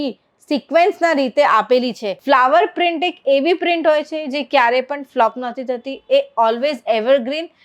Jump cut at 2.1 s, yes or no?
yes